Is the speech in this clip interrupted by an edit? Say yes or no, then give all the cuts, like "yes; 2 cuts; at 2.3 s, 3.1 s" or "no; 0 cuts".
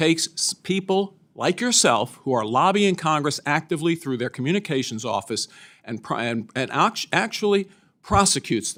no; 0 cuts